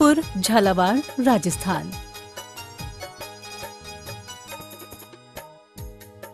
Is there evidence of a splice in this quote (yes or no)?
yes